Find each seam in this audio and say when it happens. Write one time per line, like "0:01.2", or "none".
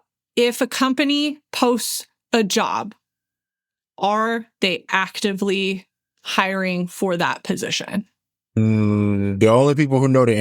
0:08.6